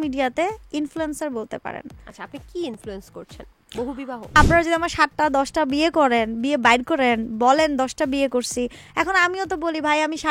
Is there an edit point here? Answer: yes; 1 cut; at 4.4 s

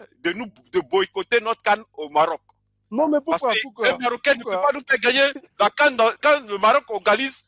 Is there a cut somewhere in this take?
no; 0 cuts

